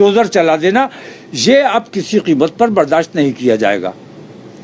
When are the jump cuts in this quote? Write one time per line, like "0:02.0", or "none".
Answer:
none